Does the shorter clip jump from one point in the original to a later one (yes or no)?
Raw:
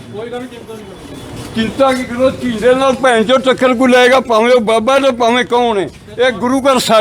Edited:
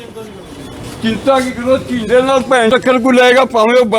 yes